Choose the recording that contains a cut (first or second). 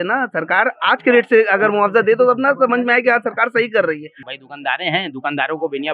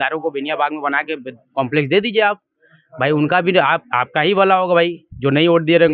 first